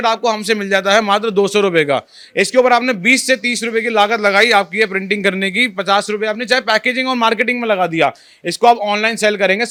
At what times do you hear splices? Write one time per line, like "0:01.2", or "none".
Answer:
none